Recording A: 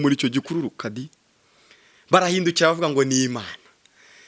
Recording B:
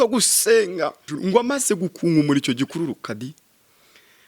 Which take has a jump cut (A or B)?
B